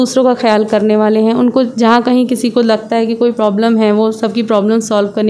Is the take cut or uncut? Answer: uncut